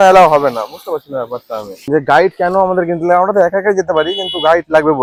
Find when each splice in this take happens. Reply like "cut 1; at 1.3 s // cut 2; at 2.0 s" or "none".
none